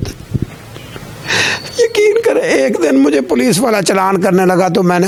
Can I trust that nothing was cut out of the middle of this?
yes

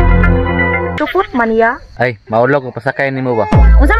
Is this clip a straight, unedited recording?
no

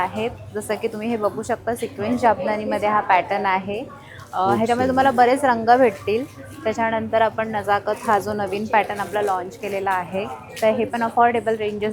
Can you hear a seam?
no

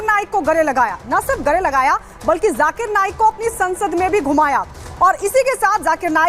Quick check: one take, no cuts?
yes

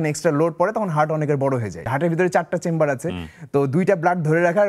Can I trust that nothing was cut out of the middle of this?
no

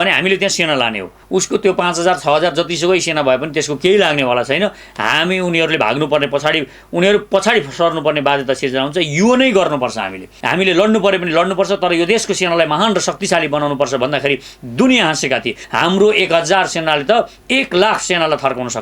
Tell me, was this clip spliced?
yes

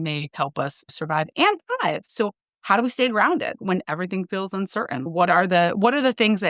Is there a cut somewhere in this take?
yes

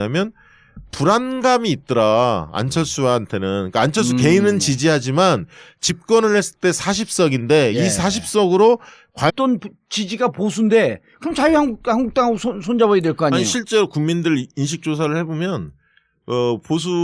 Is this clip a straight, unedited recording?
yes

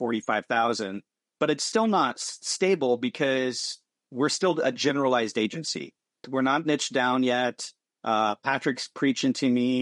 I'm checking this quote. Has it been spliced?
yes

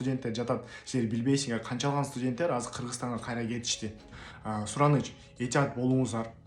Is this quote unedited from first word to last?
no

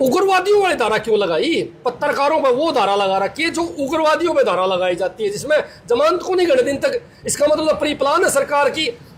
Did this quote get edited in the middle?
no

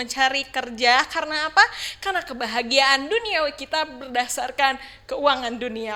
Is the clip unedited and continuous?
yes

